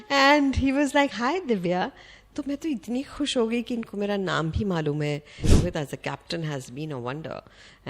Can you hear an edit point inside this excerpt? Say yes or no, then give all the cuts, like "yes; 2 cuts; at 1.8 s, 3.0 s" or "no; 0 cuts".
yes; 1 cut; at 5.5 s